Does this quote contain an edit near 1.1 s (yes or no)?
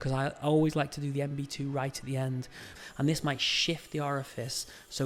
no